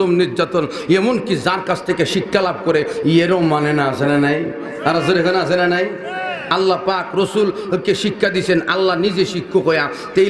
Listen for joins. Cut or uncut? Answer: uncut